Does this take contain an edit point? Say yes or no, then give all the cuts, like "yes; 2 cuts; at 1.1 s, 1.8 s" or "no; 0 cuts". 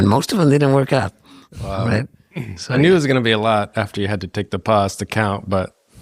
no; 0 cuts